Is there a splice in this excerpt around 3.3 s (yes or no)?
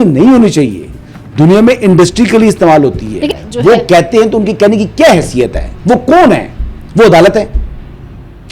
yes